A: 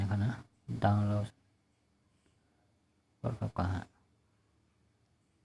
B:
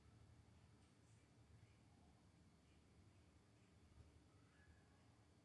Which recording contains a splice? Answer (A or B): B